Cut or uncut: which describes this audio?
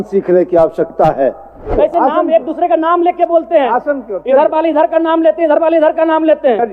cut